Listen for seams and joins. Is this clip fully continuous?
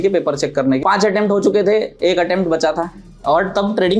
no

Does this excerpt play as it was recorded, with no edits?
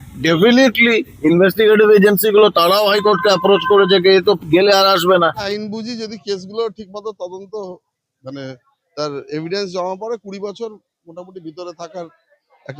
no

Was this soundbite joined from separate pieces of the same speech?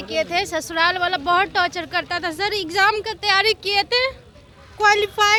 no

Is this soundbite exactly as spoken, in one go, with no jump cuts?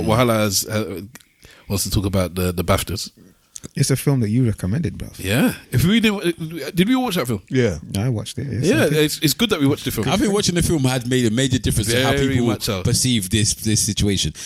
yes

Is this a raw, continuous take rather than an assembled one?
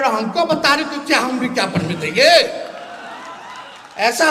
yes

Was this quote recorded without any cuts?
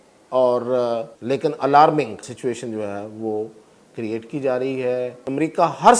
no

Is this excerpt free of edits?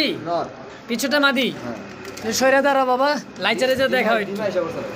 yes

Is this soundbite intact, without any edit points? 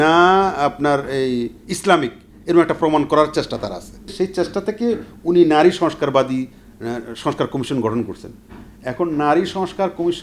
no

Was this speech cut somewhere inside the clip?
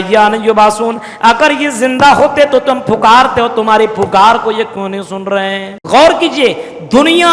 yes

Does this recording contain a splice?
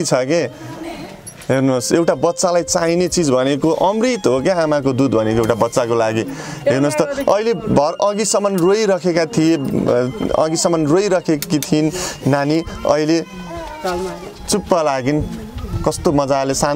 no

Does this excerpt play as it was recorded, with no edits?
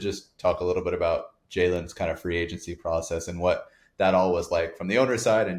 yes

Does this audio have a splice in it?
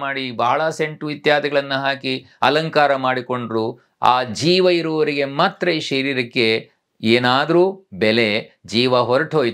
no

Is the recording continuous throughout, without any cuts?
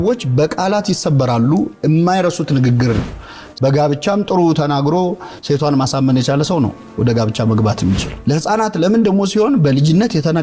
no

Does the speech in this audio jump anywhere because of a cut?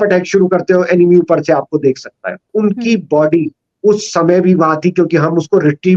yes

